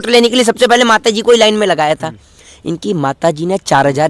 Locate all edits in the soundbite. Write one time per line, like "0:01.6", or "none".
none